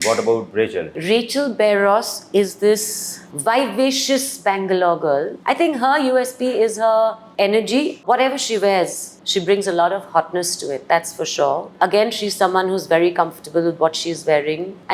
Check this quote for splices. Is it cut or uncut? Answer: uncut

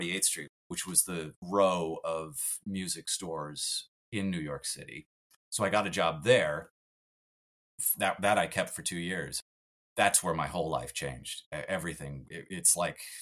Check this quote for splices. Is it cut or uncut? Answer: uncut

